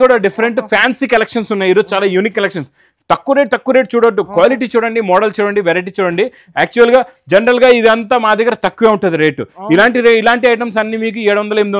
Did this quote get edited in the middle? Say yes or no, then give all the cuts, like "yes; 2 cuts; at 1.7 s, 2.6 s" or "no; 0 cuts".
no; 0 cuts